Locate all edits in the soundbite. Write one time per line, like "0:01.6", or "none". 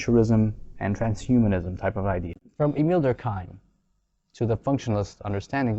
0:02.3